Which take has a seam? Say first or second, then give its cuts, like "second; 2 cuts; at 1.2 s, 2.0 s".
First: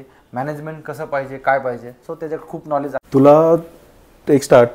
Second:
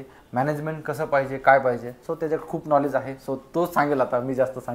first; 1 cut; at 3.1 s